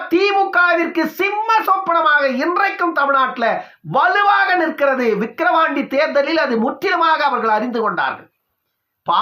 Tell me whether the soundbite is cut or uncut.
uncut